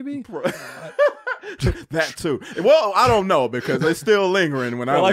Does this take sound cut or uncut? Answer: uncut